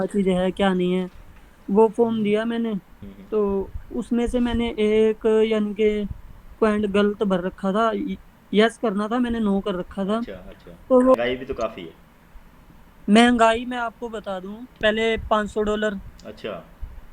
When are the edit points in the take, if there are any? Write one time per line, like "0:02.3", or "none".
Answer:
0:11.1
0:14.8